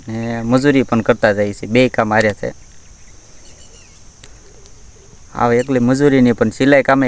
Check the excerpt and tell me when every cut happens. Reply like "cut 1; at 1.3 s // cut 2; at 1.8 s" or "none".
cut 1; at 4.2 s